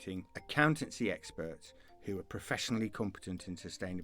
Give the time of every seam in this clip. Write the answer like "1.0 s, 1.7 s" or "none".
none